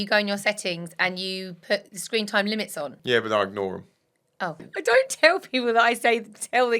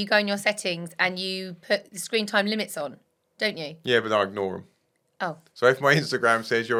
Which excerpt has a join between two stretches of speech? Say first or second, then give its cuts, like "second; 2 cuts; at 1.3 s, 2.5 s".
first; 2 cuts; at 3.0 s, 4.6 s